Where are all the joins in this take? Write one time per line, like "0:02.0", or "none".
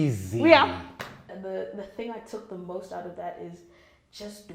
0:01.2